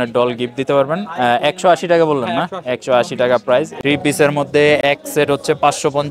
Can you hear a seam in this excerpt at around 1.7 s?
no; 2 cuts; at 3.7 s, 4.8 s

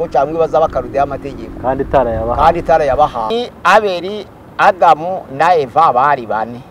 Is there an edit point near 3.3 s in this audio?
yes; 1 cut; at 3.3 s

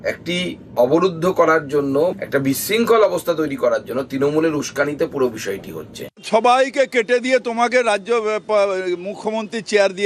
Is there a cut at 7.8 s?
no; 1 cut; at 6.2 s

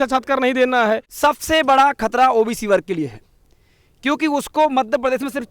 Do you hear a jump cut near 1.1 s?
yes; 1 cut; at 1.1 s

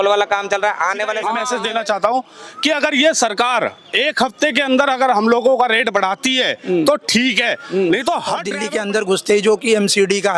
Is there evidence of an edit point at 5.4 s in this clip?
no; 2 cuts; at 1.4 s, 8.5 s

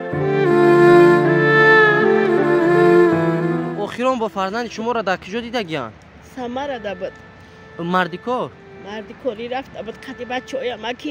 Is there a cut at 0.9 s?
no; 1 cut; at 3.7 s

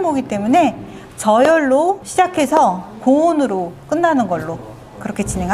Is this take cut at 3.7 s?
no; 0 cuts

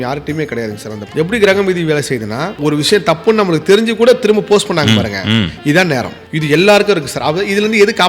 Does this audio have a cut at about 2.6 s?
yes; 3 cuts; at 1.0 s, 2.6 s, 6.2 s

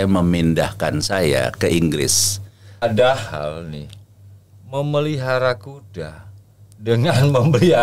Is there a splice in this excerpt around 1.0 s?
no; 1 cut; at 2.8 s

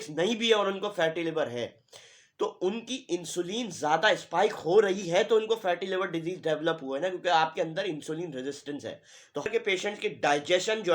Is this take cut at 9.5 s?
yes; 1 cut; at 9.5 s

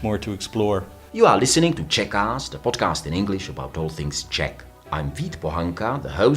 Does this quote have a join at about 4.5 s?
no; 1 cut; at 1.0 s

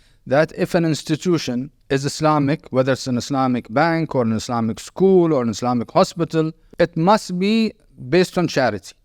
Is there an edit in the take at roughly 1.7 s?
yes; 2 cuts; at 1.7 s, 6.6 s

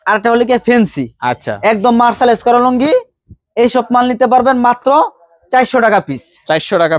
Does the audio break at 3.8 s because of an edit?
no; 0 cuts

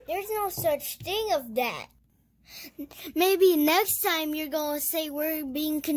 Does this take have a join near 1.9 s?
yes; 1 cut; at 1.9 s

